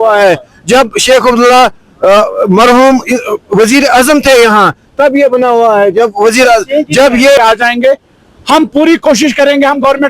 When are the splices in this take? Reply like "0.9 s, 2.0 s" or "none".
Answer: 7.4 s